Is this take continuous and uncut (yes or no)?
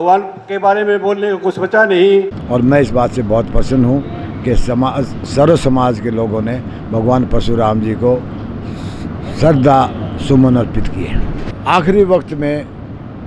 no